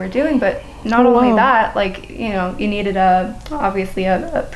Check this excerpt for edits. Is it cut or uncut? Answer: uncut